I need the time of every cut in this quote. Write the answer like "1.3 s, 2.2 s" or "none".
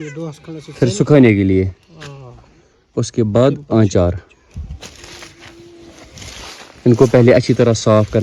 none